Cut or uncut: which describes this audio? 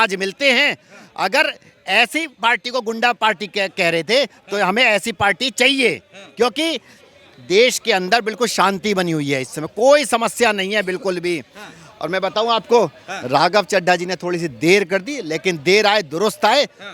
uncut